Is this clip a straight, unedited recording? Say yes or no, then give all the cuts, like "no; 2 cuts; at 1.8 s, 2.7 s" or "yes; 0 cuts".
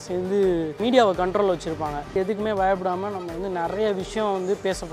no; 2 cuts; at 0.8 s, 2.1 s